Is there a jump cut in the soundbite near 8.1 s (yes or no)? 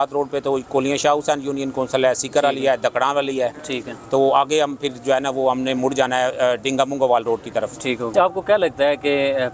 yes